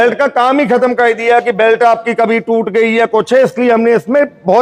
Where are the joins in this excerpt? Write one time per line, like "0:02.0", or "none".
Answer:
none